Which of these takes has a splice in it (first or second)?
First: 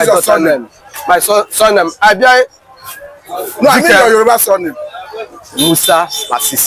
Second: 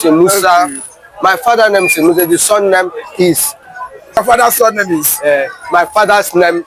second